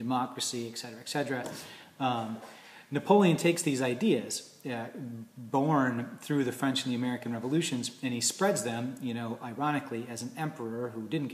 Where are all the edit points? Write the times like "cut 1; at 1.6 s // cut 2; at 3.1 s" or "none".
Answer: cut 1; at 3.8 s